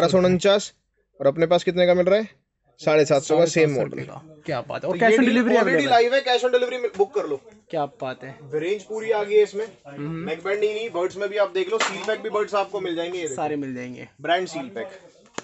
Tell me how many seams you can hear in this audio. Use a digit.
0